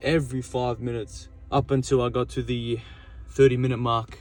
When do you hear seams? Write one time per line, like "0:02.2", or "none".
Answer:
none